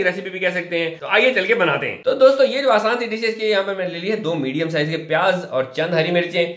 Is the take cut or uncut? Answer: uncut